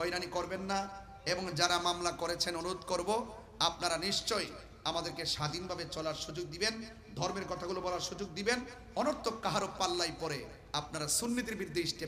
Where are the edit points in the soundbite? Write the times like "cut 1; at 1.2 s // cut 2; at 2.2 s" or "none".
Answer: none